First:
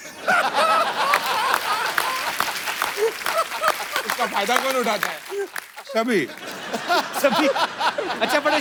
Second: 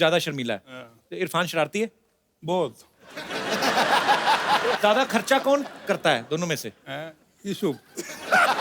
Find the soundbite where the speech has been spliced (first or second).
second